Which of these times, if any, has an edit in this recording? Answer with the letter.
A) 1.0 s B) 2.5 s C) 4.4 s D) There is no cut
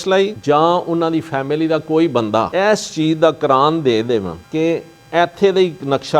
B